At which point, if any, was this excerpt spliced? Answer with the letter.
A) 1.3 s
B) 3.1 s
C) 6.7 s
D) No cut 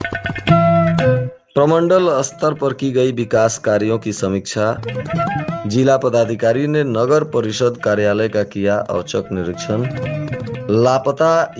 A